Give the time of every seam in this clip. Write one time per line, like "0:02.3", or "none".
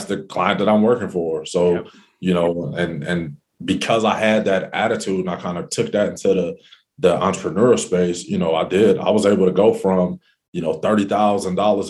none